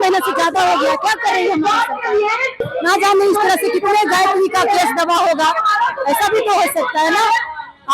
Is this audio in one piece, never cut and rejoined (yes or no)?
no